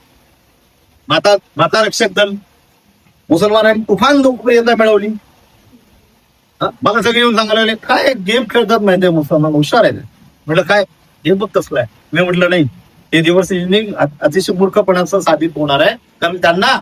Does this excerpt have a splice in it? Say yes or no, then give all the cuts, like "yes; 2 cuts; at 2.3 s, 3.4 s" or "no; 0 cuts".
no; 0 cuts